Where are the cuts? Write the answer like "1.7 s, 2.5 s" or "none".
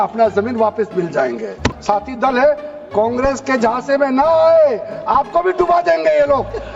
1.7 s